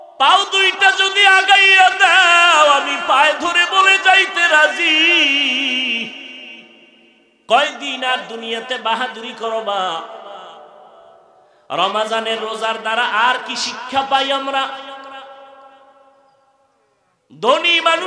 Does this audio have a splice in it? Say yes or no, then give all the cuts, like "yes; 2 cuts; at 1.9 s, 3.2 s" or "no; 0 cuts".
yes; 1 cut; at 11.3 s